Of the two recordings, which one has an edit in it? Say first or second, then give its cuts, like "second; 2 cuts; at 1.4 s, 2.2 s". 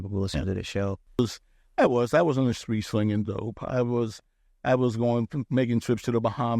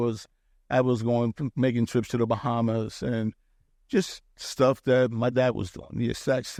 first; 1 cut; at 1.2 s